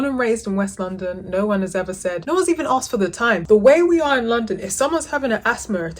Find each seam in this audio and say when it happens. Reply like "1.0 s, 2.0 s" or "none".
2.2 s, 3.4 s